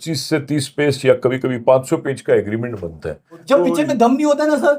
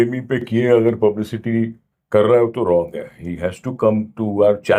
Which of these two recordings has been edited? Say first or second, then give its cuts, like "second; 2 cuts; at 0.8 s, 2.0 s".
first; 1 cut; at 3.4 s